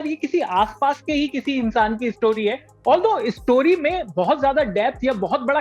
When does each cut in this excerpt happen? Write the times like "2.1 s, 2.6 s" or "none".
none